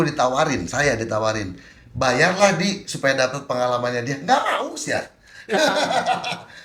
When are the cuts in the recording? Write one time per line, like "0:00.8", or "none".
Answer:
none